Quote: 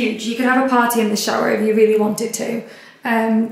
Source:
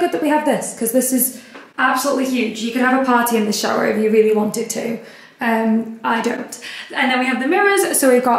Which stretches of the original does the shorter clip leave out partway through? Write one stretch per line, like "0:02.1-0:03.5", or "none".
none